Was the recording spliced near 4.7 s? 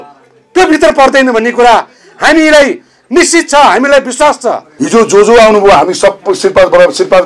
yes; 1 cut; at 4.7 s

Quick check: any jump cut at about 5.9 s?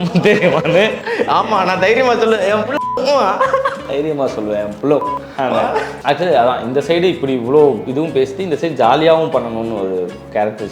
yes; 1 cut; at 5.9 s

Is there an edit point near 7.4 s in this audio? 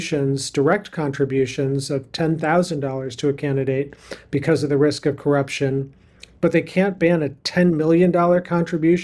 no; 0 cuts

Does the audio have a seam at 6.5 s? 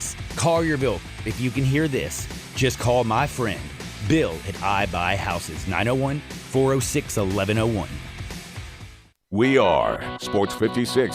no; 1 cut; at 9.2 s

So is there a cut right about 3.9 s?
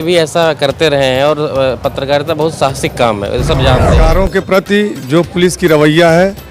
yes; 1 cut; at 3.9 s

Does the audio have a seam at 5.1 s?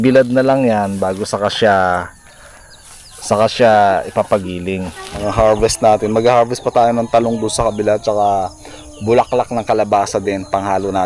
yes; 1 cut; at 5.1 s

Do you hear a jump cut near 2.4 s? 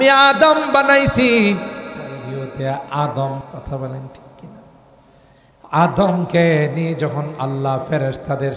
yes; 1 cut; at 2.4 s

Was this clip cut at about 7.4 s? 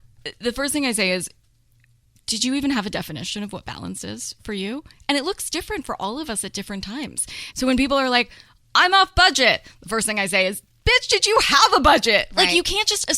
yes; 1 cut; at 7.4 s

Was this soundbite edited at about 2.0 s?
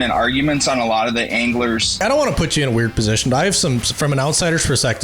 yes; 1 cut; at 2.0 s

